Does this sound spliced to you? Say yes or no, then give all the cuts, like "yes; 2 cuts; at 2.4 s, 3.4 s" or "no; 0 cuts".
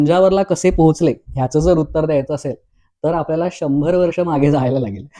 no; 0 cuts